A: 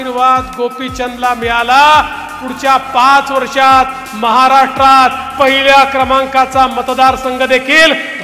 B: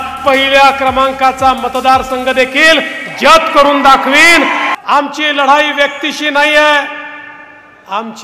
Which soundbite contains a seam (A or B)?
B